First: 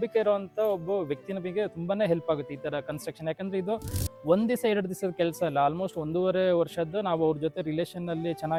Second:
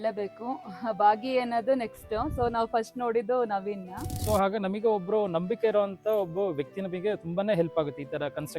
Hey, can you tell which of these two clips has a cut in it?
second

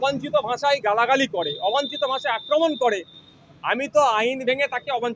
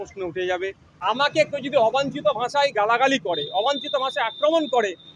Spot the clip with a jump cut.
second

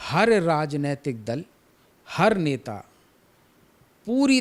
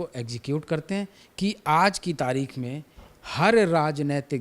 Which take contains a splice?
second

